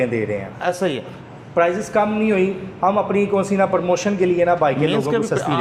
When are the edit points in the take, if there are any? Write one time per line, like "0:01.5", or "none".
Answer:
none